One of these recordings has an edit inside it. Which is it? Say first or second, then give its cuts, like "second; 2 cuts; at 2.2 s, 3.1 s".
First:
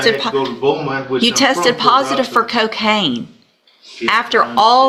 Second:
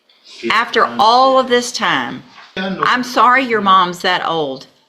second; 1 cut; at 2.6 s